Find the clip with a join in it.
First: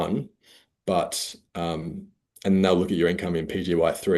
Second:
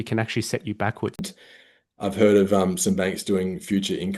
second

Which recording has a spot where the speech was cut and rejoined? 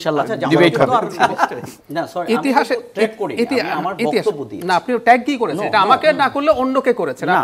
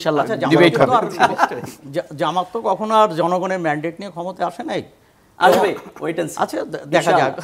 first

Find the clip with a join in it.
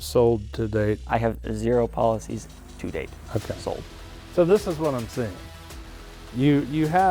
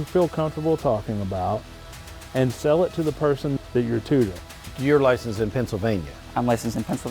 second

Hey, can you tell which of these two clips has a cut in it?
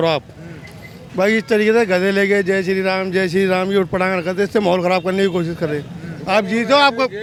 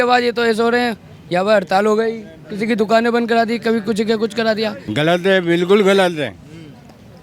second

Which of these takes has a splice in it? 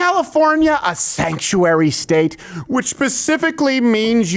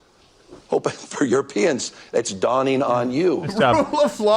second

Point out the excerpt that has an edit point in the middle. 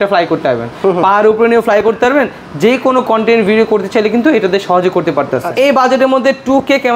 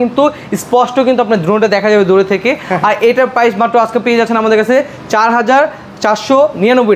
first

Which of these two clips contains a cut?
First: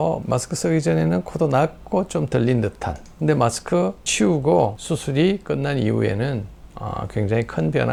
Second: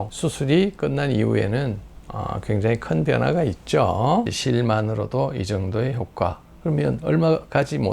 second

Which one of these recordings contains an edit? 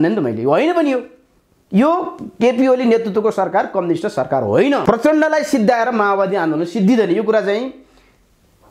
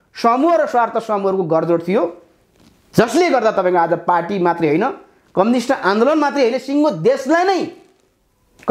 first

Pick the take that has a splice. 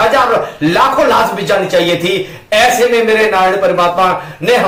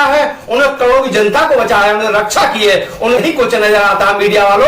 second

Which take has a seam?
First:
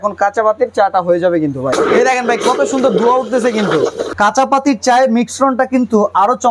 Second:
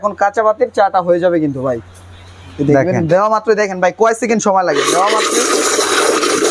first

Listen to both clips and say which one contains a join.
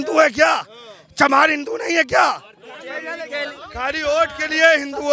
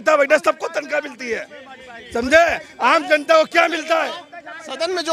first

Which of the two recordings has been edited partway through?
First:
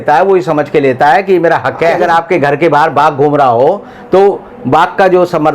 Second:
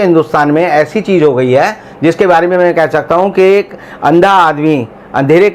first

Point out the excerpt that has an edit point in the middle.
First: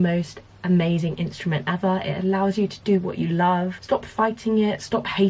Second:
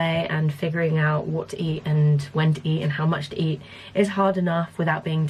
first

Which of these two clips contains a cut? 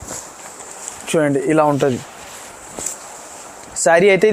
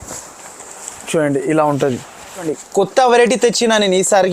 second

